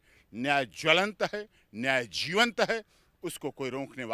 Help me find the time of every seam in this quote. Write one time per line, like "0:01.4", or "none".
none